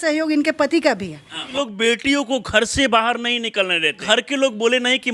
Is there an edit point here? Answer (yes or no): yes